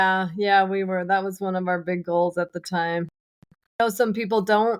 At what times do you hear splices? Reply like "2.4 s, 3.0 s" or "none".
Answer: 3.8 s